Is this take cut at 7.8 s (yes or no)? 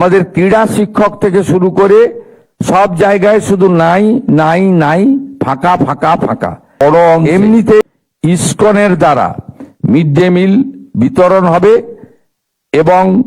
yes